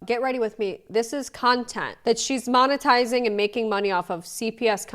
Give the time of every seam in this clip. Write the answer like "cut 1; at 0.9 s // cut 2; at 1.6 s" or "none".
cut 1; at 2.0 s